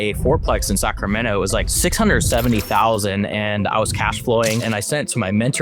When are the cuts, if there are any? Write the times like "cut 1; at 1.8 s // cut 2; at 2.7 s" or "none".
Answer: none